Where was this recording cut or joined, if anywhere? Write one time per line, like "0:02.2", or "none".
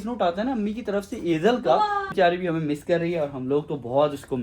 0:02.1